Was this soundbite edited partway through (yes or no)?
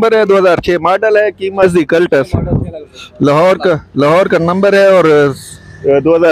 yes